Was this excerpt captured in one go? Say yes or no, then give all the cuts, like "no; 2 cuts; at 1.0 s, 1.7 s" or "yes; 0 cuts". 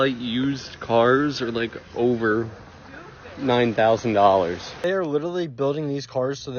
no; 1 cut; at 4.7 s